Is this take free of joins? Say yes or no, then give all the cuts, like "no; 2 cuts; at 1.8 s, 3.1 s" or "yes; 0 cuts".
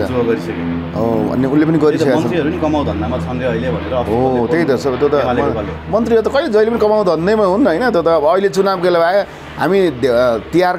yes; 0 cuts